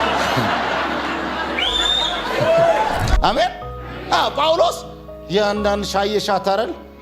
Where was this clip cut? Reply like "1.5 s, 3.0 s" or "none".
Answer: 3.1 s